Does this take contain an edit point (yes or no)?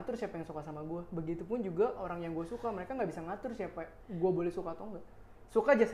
no